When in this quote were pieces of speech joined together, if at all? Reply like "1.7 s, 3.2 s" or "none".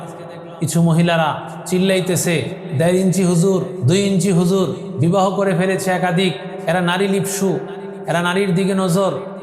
1.5 s, 2.6 s, 3.8 s, 4.9 s, 6.5 s